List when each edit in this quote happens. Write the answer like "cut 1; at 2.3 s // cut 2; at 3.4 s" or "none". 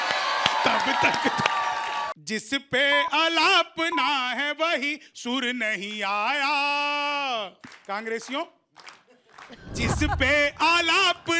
cut 1; at 2.2 s